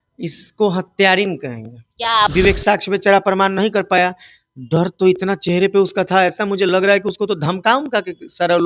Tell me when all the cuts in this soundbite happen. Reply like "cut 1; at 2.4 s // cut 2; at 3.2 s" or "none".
cut 1; at 2.3 s